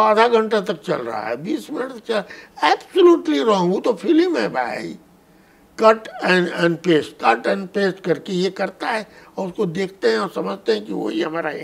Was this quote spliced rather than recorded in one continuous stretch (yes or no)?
no